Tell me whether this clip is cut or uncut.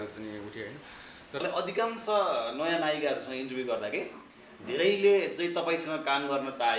cut